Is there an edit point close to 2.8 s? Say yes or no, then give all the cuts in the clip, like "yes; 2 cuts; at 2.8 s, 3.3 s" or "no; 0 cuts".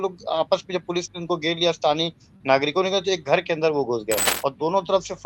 no; 1 cut; at 4.3 s